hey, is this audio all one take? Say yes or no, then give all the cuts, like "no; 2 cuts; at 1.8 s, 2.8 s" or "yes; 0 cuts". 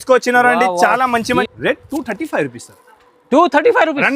no; 1 cut; at 1.5 s